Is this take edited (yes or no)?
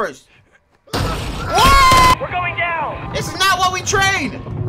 yes